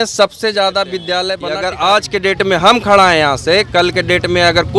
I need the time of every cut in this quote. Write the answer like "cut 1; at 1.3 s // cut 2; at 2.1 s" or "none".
cut 1; at 1.4 s